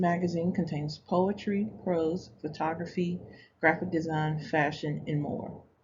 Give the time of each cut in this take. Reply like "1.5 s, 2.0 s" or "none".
2.9 s

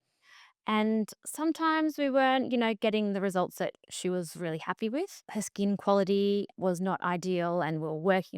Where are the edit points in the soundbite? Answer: 5.2 s, 6.5 s

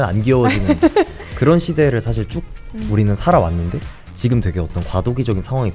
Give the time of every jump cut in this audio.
none

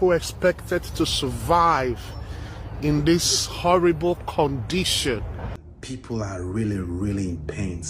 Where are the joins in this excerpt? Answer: 5.7 s

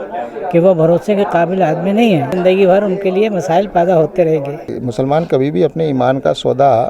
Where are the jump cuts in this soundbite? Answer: 2.3 s, 4.7 s

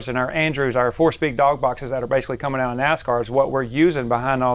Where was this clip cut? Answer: none

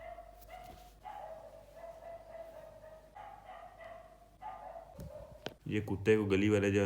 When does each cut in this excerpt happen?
0.9 s, 3.1 s

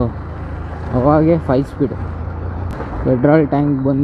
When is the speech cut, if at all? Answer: 2.7 s

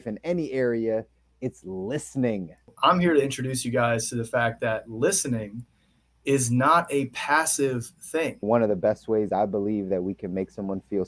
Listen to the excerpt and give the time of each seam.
2.7 s, 8.4 s

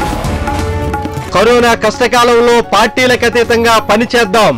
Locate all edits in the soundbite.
1.2 s

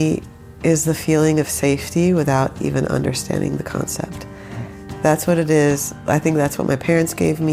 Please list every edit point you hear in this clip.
none

